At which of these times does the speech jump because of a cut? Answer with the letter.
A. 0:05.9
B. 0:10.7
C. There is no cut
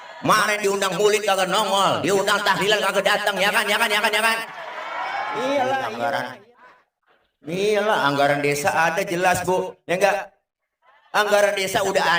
A